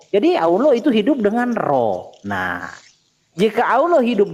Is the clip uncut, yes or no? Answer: yes